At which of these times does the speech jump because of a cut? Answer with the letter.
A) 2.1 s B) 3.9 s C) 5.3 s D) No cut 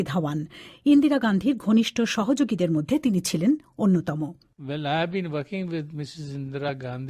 A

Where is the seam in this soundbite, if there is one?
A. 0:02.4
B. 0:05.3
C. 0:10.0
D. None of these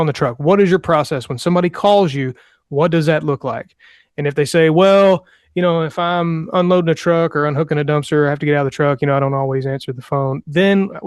D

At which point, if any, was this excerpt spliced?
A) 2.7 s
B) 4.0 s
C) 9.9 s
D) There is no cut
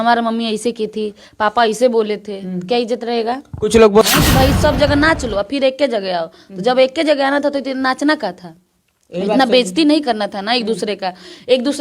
B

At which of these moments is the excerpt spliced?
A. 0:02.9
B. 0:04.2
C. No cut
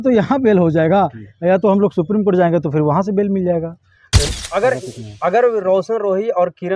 B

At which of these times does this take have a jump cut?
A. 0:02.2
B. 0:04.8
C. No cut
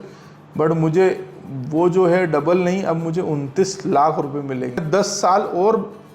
B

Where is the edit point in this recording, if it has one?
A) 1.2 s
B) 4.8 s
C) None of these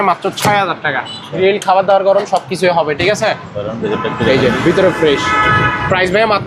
A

